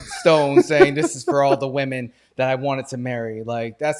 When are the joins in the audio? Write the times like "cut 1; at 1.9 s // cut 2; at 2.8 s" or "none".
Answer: none